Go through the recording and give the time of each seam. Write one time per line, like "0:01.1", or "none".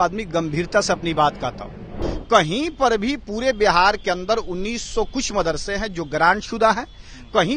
0:02.1